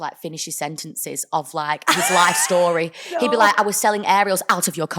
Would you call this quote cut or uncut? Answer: uncut